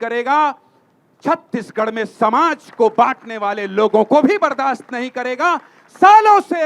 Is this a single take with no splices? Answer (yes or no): yes